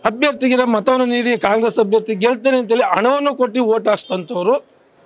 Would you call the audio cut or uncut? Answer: uncut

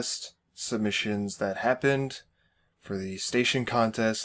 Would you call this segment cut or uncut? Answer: cut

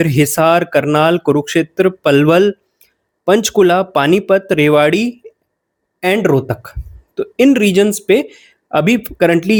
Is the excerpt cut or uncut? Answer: uncut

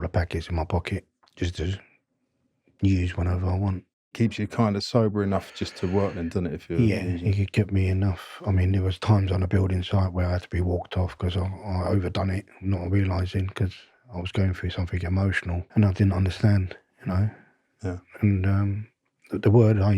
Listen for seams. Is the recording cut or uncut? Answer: cut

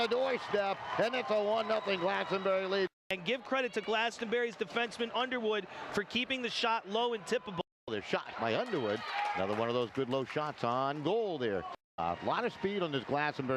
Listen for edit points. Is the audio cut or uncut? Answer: cut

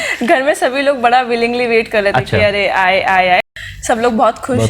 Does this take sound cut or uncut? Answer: cut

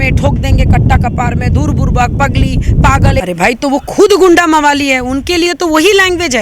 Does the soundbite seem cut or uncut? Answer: cut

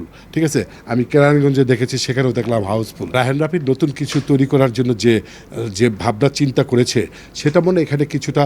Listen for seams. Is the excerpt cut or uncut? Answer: cut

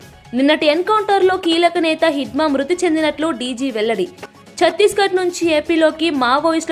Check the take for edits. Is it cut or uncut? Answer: uncut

